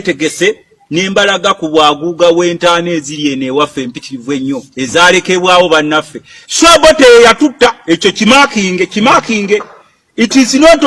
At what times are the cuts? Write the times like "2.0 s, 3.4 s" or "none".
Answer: none